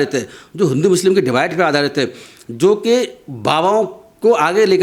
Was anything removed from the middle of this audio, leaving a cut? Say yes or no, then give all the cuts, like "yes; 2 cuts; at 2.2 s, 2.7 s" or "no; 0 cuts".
no; 0 cuts